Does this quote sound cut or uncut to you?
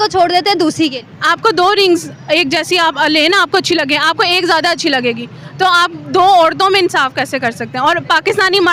uncut